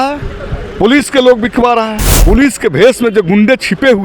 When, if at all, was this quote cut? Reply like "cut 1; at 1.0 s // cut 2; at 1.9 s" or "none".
cut 1; at 2.1 s